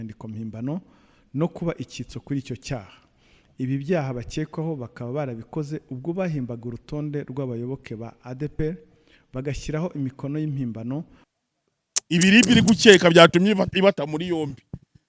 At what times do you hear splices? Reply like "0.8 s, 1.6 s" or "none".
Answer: 11.2 s